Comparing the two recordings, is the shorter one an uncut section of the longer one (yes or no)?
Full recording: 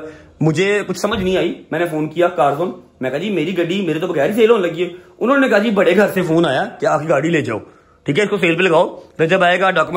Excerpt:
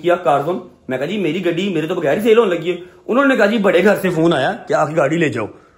yes